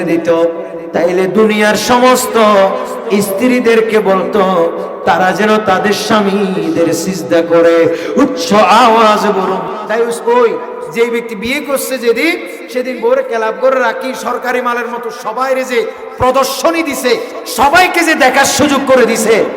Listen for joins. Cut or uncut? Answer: cut